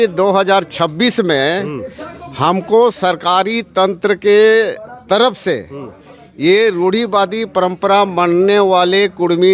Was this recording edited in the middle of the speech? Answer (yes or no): no